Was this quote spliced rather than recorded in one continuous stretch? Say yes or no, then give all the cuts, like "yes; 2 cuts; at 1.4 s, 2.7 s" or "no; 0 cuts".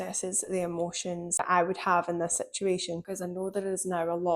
yes; 2 cuts; at 1.4 s, 3.0 s